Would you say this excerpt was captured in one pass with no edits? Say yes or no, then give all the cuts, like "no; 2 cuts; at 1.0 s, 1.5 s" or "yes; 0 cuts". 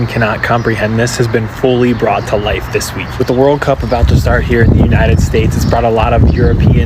yes; 0 cuts